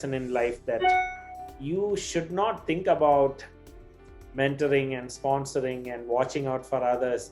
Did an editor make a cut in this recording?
no; 0 cuts

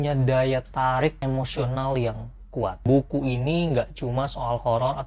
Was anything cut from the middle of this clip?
yes; 2 cuts; at 1.2 s, 2.8 s

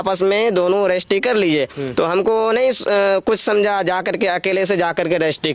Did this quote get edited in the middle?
no; 0 cuts

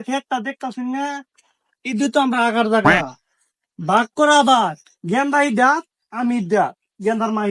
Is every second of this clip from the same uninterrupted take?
yes; 0 cuts

